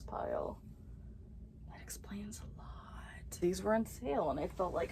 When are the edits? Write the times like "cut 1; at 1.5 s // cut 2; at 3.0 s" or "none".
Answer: cut 1; at 3.2 s